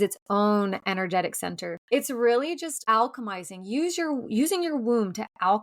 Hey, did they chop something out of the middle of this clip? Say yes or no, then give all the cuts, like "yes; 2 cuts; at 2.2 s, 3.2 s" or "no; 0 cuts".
yes; 1 cut; at 1.8 s